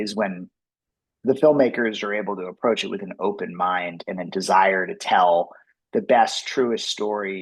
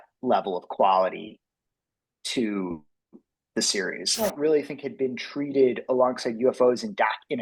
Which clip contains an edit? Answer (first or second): second